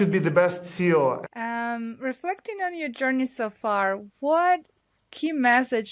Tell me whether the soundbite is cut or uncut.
uncut